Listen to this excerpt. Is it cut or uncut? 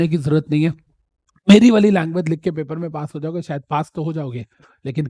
uncut